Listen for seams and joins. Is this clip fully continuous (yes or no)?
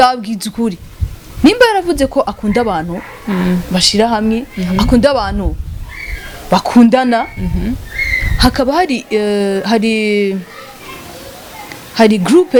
yes